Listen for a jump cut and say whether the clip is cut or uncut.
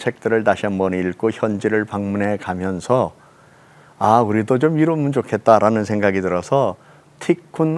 uncut